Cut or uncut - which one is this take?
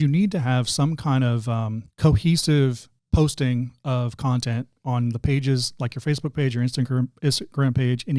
cut